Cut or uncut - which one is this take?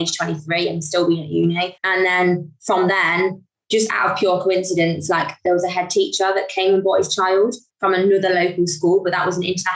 cut